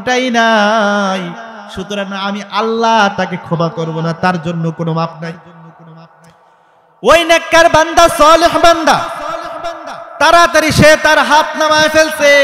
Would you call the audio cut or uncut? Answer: uncut